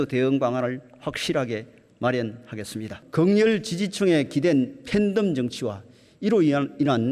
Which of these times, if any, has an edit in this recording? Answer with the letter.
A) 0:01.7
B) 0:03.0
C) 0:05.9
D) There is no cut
B